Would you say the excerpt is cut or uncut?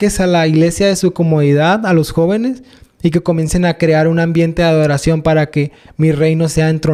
uncut